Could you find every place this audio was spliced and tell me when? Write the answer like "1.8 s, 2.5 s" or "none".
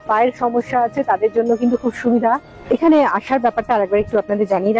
2.5 s